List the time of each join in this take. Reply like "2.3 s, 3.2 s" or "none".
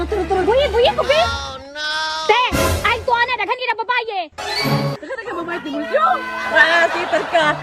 5.0 s